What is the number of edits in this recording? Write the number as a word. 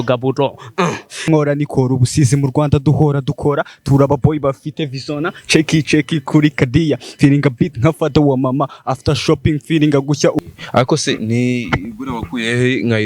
two